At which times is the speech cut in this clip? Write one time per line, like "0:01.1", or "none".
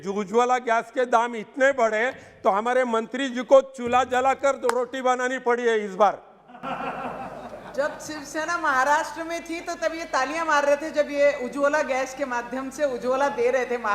none